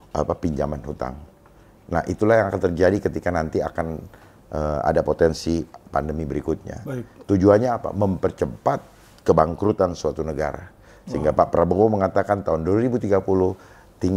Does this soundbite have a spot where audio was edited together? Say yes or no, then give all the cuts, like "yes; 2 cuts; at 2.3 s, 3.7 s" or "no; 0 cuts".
no; 0 cuts